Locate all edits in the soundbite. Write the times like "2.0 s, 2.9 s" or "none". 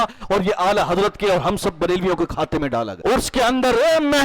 3.0 s